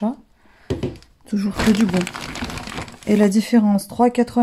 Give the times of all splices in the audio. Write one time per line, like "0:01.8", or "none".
none